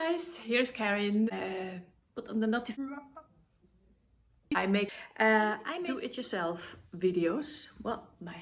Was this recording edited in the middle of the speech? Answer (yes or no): yes